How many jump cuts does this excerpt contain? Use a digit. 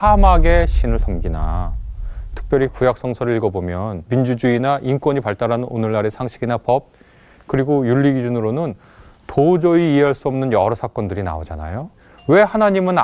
2